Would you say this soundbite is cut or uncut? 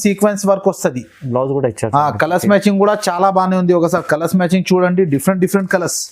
uncut